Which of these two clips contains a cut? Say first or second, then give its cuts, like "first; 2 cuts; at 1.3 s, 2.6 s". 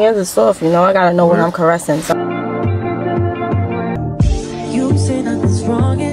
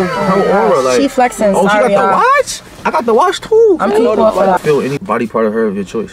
second; 1 cut; at 4.8 s